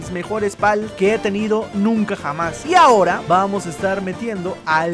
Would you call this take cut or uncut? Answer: uncut